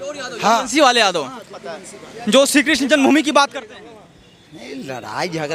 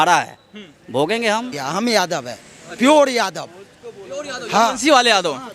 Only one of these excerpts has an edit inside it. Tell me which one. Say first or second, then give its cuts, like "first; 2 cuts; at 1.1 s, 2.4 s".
second; 1 cut; at 1.6 s